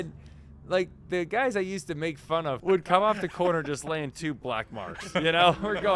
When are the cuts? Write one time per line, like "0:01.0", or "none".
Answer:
0:02.6

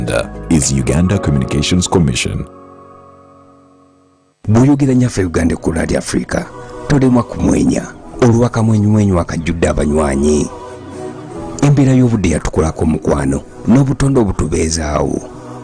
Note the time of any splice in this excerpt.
0:04.3

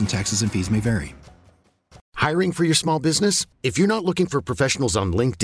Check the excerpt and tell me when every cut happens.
0:02.1

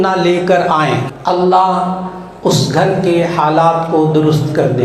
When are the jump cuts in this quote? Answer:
0:01.0

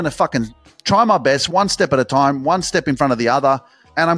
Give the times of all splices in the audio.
0:01.4

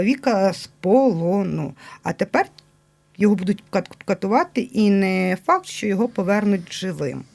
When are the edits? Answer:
none

